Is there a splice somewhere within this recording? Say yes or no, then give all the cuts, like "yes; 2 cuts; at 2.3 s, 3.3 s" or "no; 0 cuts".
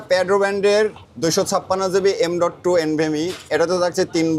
no; 0 cuts